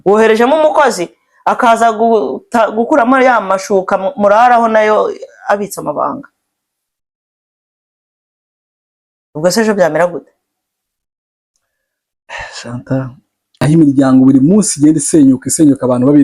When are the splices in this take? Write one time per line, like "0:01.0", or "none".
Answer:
0:13.6